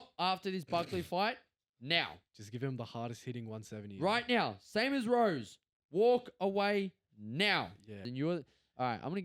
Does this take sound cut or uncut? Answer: cut